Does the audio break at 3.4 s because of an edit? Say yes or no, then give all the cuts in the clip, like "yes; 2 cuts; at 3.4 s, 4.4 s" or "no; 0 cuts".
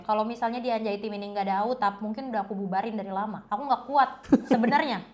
yes; 2 cuts; at 3.4 s, 4.2 s